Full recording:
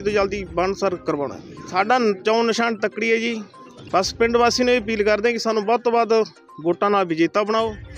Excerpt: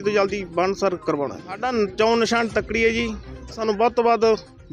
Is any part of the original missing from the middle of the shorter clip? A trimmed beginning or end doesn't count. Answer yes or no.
yes